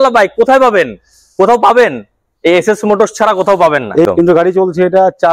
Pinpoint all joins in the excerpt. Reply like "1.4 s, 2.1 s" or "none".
4.1 s